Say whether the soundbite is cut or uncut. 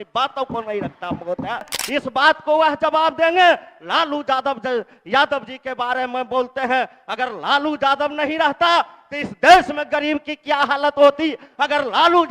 cut